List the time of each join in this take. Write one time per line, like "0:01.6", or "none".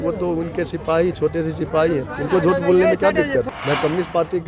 0:03.6